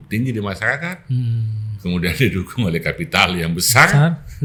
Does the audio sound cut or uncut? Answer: uncut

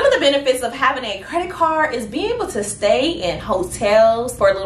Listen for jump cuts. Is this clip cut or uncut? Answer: uncut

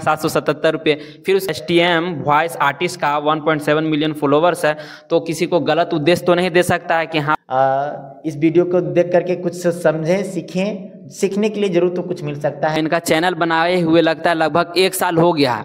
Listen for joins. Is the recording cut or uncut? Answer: cut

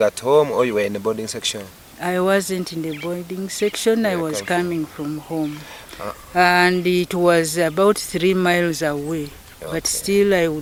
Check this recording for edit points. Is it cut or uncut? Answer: uncut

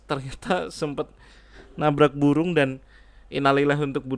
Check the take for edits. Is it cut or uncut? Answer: uncut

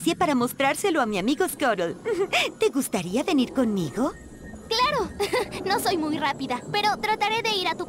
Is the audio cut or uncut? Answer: uncut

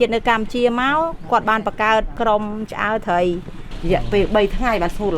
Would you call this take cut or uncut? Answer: cut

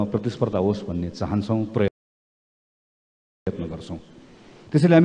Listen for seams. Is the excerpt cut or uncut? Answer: uncut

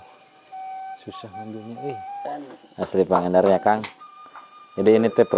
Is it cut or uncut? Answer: cut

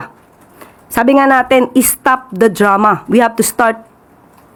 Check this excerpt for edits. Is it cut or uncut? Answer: uncut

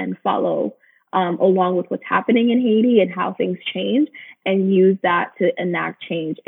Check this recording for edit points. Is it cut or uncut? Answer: uncut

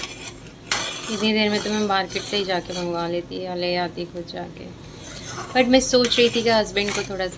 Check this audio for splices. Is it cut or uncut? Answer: uncut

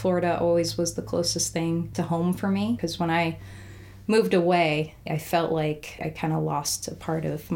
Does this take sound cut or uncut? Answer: cut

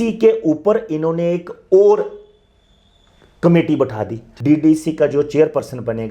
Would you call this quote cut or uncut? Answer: cut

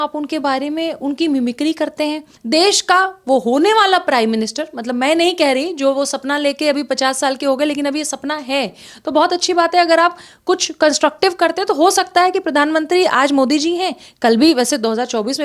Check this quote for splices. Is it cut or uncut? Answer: cut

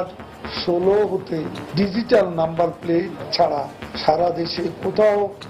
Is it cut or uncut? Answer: cut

